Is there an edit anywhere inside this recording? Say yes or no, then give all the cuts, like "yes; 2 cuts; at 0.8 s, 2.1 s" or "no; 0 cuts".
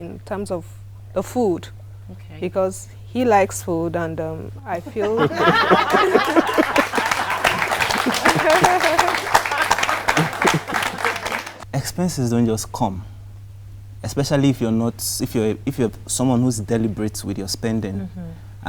yes; 1 cut; at 11.5 s